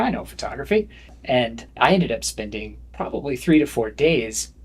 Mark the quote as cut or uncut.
cut